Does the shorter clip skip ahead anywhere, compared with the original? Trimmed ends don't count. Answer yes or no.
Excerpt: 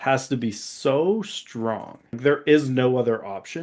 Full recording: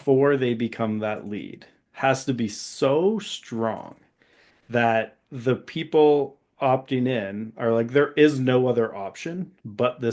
yes